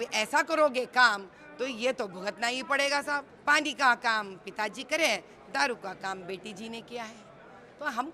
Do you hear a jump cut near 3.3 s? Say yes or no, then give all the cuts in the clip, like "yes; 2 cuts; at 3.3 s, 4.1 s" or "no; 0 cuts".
yes; 1 cut; at 3.3 s